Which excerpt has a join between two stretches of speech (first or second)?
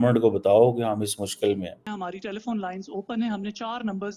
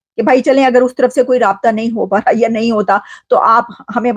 first